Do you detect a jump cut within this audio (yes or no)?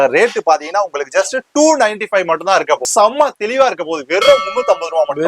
yes